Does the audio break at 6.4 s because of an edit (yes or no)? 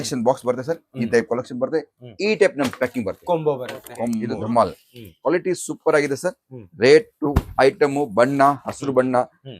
no